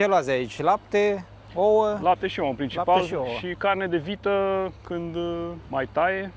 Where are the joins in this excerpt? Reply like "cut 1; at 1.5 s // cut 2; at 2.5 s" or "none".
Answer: none